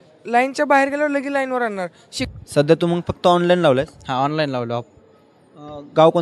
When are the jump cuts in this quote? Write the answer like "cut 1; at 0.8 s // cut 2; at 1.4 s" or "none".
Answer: cut 1; at 2.2 s